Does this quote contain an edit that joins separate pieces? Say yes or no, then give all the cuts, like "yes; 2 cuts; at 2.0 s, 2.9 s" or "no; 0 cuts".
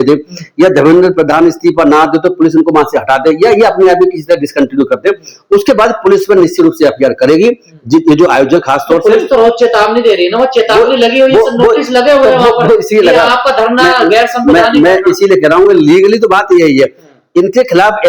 no; 0 cuts